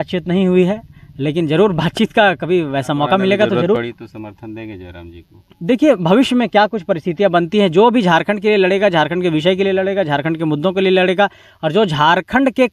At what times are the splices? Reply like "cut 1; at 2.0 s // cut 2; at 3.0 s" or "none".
cut 1; at 3.8 s